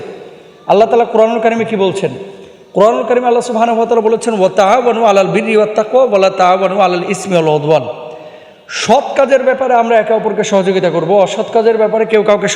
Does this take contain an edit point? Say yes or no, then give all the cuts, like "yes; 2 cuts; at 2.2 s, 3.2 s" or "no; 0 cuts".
no; 0 cuts